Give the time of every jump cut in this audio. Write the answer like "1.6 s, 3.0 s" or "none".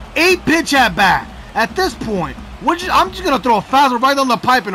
none